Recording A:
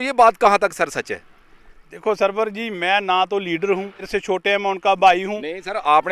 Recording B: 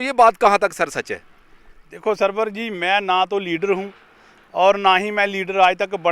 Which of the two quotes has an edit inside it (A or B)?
A